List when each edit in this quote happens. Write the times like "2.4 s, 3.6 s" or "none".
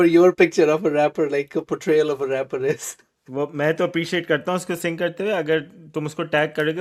none